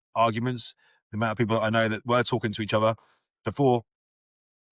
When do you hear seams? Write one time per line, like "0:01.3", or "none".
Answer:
none